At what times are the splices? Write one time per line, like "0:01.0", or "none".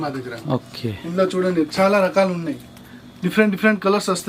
none